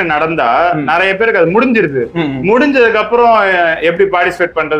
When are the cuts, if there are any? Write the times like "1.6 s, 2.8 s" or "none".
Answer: none